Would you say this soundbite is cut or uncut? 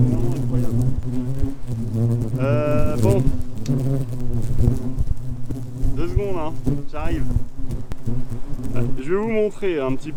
uncut